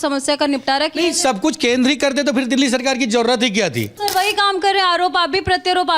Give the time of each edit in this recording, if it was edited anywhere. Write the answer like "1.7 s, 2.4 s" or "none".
3.9 s

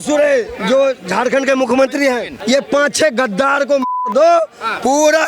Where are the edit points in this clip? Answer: 2.3 s

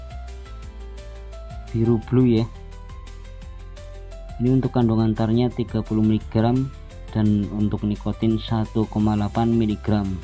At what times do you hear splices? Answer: 1.7 s, 2.5 s, 4.4 s

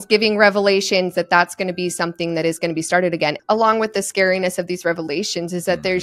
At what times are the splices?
3.3 s

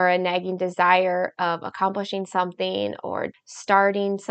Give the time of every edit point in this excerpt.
3.3 s

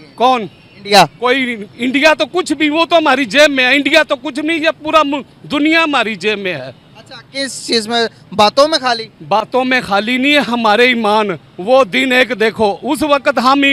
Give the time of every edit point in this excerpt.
none

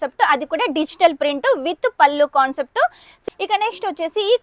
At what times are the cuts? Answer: 3.2 s

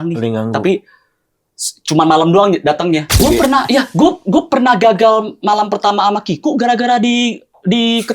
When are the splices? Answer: 3.3 s

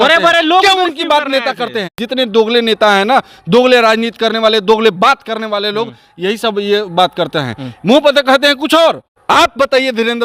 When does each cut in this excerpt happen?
2.0 s, 9.1 s

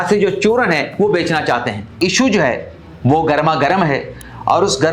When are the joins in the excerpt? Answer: 2.0 s

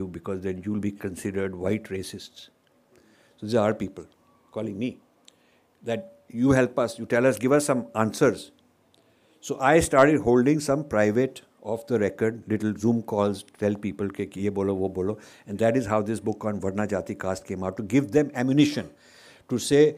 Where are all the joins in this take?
none

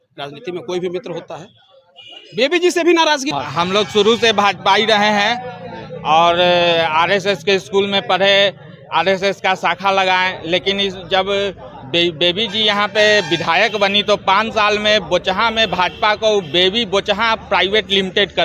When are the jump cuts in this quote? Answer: 3.3 s

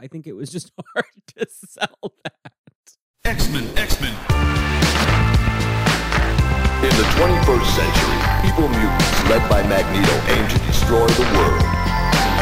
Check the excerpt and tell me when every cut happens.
3.1 s

